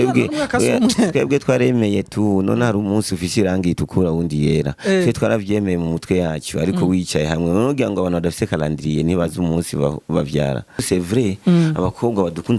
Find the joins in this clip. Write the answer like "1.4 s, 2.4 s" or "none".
10.8 s